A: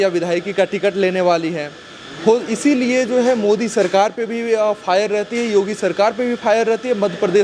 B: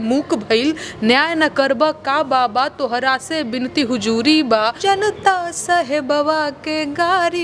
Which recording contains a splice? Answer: B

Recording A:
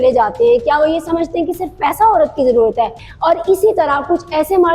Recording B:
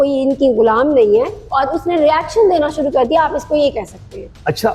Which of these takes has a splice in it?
A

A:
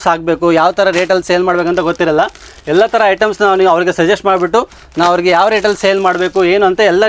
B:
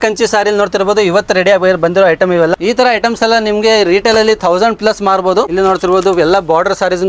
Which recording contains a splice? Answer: B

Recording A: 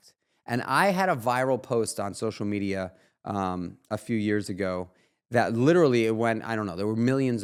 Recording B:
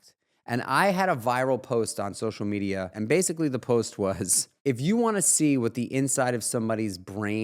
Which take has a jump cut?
B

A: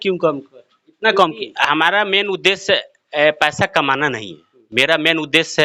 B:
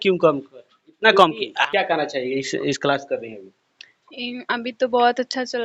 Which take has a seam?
B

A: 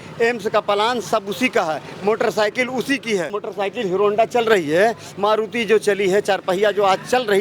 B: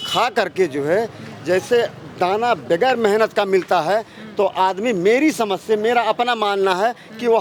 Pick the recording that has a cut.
A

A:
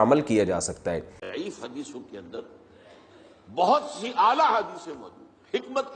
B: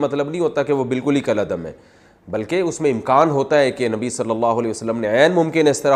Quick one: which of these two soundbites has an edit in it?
A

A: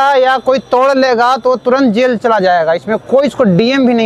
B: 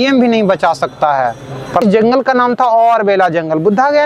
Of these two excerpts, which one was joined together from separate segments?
B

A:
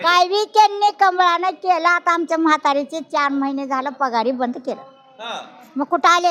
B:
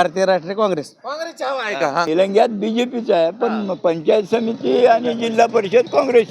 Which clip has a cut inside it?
B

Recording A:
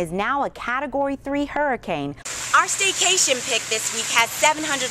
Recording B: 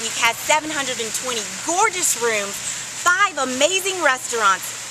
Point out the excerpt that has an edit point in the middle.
A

